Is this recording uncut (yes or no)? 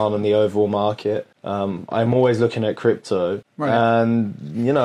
no